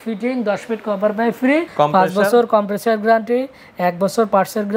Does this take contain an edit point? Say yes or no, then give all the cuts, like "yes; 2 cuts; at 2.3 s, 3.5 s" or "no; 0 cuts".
yes; 1 cut; at 1.7 s